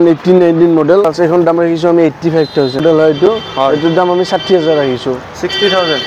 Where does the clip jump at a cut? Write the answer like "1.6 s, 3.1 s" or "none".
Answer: 1.1 s, 2.8 s

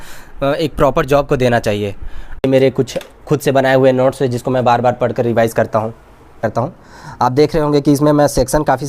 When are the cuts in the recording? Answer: 2.4 s, 6.4 s

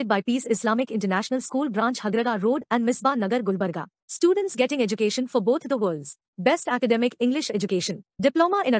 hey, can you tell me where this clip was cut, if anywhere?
none

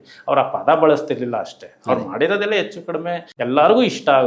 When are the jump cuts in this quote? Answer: 3.3 s

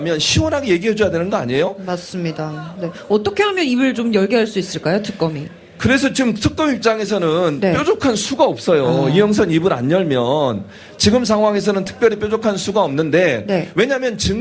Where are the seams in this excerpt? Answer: none

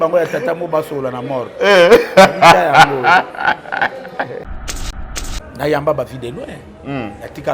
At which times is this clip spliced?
4.9 s

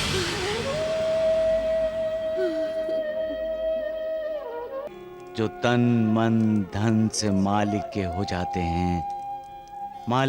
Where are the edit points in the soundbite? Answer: 4.9 s

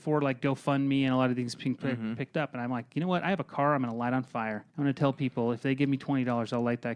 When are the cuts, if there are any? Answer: 4.6 s

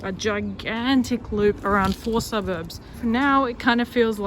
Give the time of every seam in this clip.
3.0 s

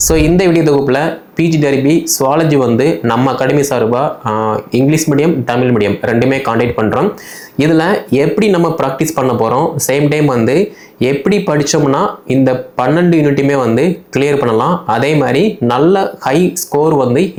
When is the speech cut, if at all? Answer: none

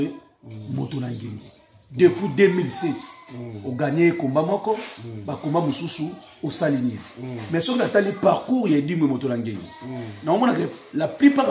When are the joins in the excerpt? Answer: none

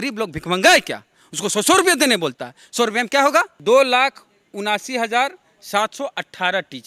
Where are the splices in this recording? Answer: 3.5 s

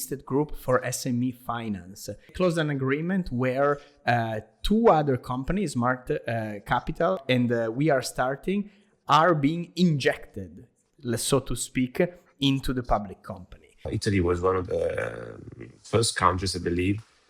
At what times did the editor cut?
2.3 s, 7.2 s, 13.9 s

